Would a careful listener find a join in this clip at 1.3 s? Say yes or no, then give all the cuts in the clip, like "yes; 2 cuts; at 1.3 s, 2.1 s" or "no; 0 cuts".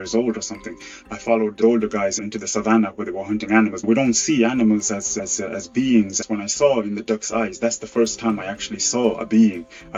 no; 0 cuts